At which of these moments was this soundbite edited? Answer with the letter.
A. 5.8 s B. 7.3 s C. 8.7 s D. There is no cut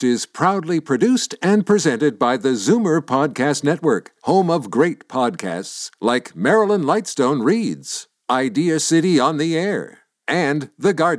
D